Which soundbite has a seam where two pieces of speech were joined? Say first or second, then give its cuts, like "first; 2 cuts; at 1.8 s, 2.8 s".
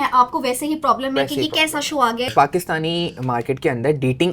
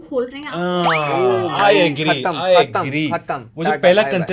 first; 1 cut; at 2.3 s